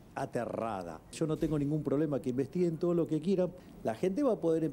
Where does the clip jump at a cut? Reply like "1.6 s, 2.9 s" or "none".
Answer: 1.1 s, 3.6 s